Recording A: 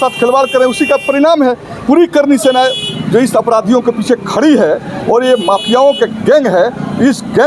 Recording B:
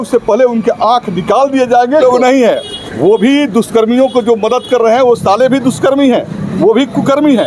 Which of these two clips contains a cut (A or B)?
B